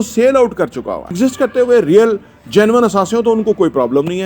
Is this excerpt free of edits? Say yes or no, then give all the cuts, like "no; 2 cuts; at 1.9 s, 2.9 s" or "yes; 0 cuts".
no; 1 cut; at 1.1 s